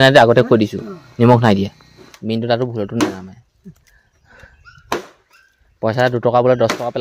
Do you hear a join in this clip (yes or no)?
yes